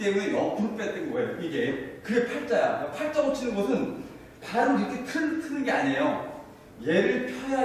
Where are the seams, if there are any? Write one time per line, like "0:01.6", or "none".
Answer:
none